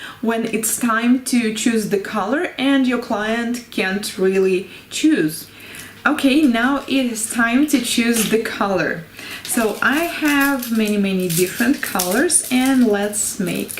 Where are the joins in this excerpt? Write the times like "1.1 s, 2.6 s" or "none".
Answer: 2.1 s